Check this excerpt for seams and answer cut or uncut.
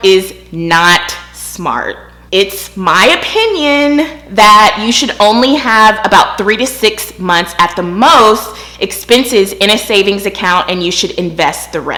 uncut